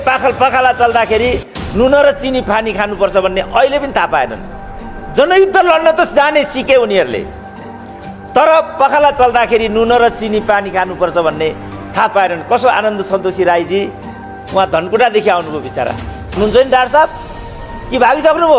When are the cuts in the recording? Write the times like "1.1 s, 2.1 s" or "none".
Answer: 16.4 s